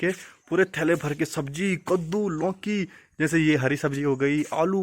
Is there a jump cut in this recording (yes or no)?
no